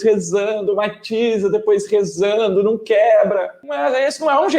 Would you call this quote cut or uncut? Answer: cut